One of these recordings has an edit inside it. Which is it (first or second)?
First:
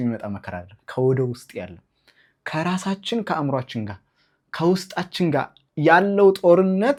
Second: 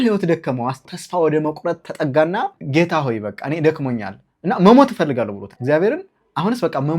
second